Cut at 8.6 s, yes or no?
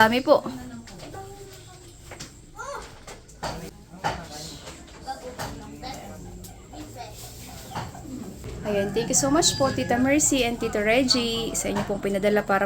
yes